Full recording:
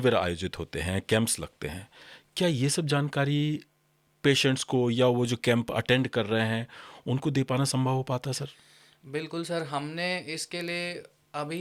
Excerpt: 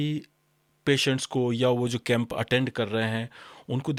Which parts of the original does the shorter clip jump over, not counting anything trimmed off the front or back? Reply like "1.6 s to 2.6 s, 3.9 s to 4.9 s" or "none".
none